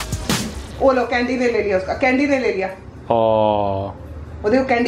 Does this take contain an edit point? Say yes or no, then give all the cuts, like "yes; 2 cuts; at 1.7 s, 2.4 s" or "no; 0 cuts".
no; 0 cuts